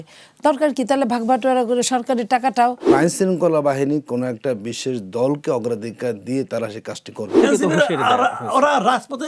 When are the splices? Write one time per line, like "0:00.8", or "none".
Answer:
0:02.9
0:07.4